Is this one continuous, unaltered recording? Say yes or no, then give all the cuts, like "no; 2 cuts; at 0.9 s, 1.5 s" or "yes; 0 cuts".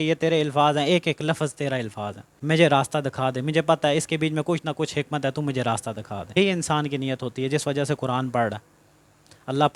no; 2 cuts; at 2.3 s, 6.4 s